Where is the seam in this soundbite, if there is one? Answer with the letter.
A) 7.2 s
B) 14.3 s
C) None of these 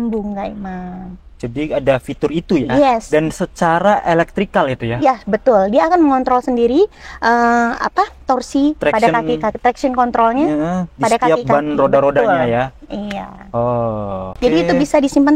B